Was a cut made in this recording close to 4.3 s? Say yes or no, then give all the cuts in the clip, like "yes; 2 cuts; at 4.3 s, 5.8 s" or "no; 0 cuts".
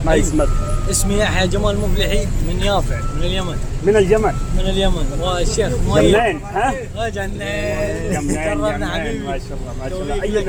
no; 0 cuts